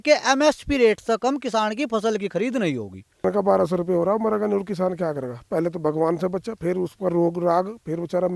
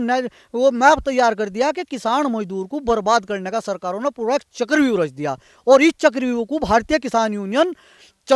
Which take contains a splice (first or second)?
first